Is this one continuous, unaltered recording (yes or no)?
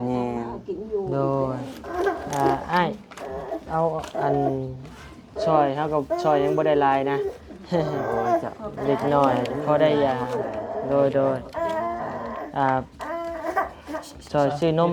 no